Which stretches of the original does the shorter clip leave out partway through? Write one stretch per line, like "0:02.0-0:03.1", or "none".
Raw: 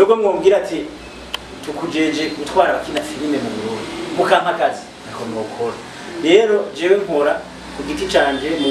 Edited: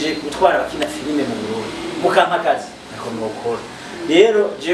none

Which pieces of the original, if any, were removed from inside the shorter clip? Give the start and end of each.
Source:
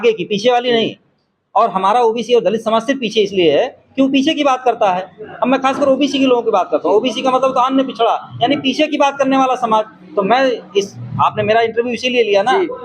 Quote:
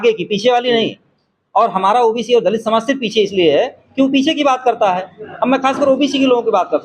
none

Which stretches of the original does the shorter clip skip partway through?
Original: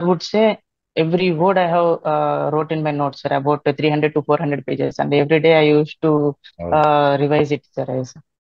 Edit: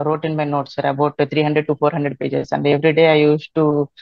none

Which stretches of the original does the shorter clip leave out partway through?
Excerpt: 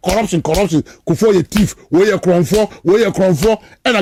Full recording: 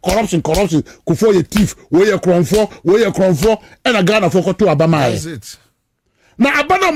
none

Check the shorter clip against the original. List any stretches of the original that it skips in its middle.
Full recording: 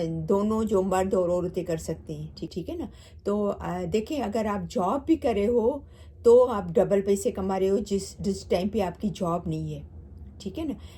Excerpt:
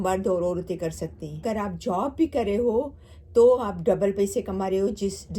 0:02.3-0:04.3

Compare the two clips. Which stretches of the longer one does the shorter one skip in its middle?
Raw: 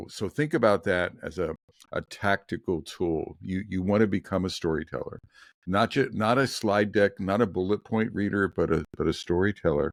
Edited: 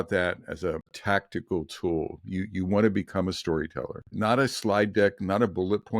0:01.7-0:02.1
0:05.3-0:06.1

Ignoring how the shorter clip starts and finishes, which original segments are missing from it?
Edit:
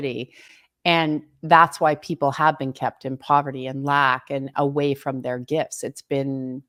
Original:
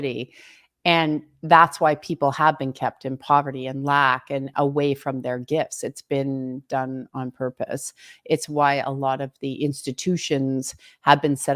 none

